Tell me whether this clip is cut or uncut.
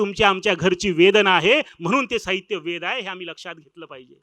uncut